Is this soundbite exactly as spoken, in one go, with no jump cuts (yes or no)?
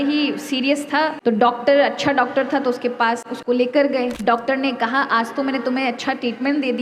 no